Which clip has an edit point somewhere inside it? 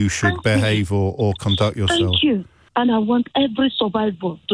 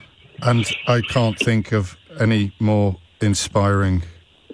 first; 1 cut; at 2.6 s

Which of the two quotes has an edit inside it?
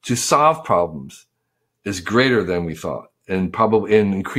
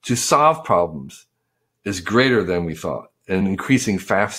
second; 1 cut; at 3.4 s

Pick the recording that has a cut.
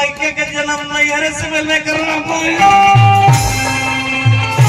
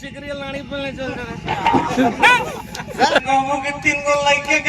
second; 1 cut; at 3.2 s

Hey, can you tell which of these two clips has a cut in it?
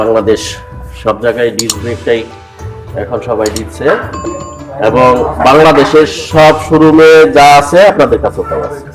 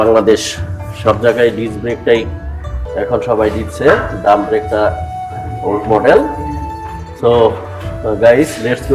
first; 1 cut; at 4.1 s

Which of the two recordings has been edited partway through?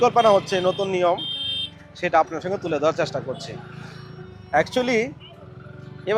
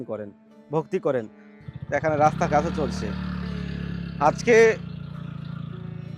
second; 1 cut; at 1.4 s

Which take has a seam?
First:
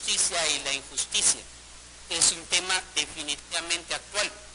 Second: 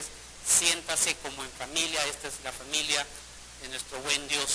second; 1 cut; at 2.6 s

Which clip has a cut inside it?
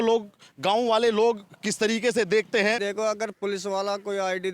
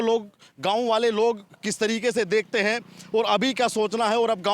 first; 1 cut; at 2.8 s

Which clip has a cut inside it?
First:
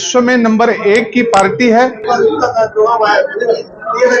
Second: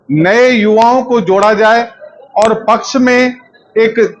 first; 1 cut; at 2.0 s

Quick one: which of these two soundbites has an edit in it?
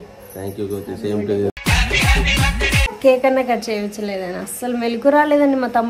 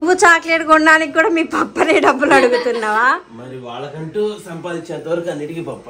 first; 1 cut; at 2.9 s

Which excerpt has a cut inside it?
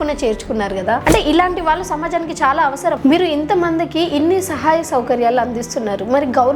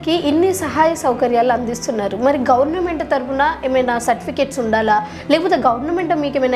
first; 2 cuts; at 1.0 s, 3.0 s

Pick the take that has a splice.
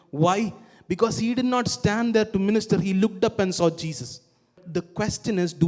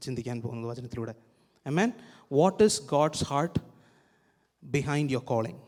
first; 1 cut; at 4.6 s

